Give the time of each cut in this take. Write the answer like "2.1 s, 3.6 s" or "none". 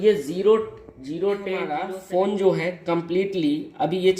1.7 s